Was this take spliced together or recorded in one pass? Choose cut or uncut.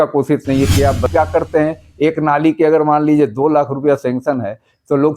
cut